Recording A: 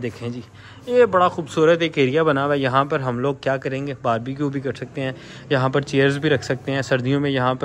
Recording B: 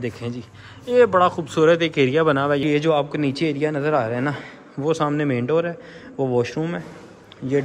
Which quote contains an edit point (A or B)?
B